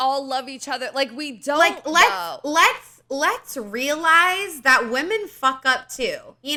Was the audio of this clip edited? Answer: no; 0 cuts

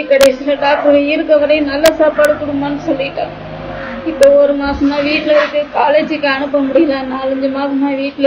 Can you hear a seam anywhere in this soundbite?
no; 0 cuts

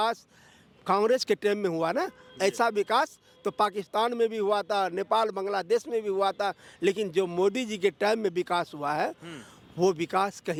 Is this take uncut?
yes; 0 cuts

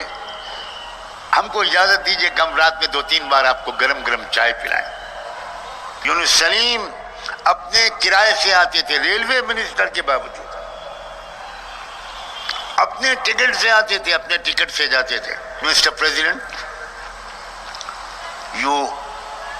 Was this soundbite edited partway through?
yes; 2 cuts; at 5.9 s, 15.6 s

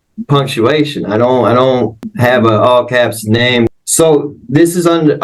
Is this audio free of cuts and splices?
no; 2 cuts; at 2.1 s, 3.7 s

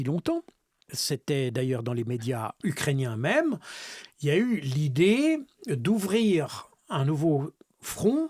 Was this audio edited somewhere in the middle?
yes; 2 cuts; at 0.9 s, 2.6 s

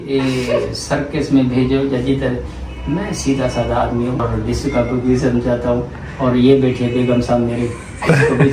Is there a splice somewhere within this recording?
yes; 1 cut; at 4.2 s

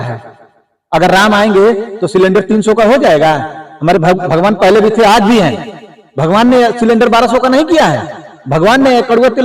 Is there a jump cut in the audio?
no; 0 cuts

